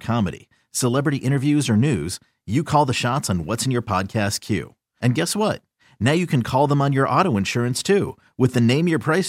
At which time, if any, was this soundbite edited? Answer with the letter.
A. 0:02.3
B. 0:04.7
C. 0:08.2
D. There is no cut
D